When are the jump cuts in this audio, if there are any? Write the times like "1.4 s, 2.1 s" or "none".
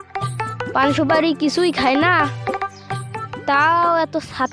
none